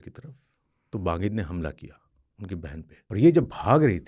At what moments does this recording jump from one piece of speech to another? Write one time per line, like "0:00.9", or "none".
0:02.9